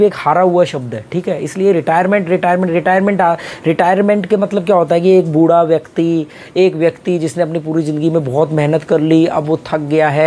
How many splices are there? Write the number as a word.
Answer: zero